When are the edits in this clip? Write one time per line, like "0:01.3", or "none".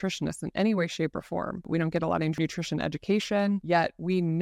0:01.6
0:02.3
0:03.6